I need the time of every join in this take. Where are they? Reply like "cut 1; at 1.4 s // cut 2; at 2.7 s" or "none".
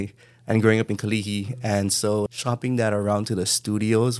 cut 1; at 2.3 s